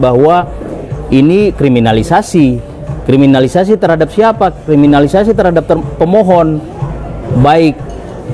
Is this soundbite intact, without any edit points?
yes; 0 cuts

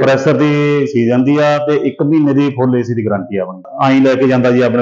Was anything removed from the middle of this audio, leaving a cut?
yes; 1 cut; at 3.6 s

